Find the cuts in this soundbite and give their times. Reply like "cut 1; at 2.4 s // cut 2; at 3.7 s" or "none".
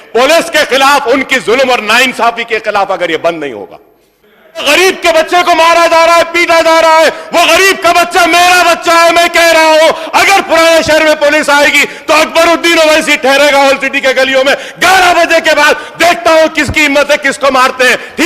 cut 1; at 4.6 s